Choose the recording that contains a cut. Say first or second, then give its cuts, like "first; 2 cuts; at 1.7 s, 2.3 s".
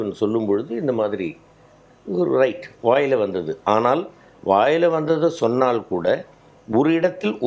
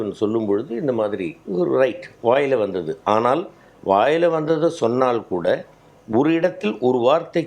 second; 1 cut; at 1.4 s